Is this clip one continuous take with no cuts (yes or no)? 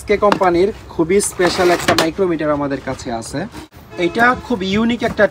no